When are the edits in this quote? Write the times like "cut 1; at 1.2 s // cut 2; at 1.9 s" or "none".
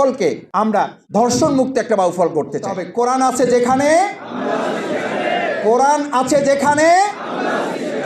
cut 1; at 2.8 s